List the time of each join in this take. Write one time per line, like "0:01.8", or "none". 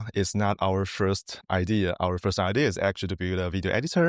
0:01.3